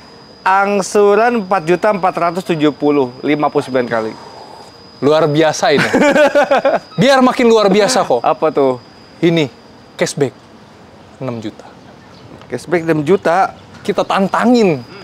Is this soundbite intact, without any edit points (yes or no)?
yes